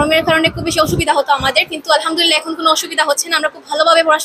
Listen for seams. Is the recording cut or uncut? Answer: uncut